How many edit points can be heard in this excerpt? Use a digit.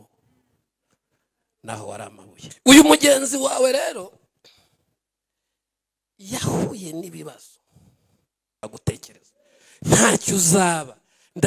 2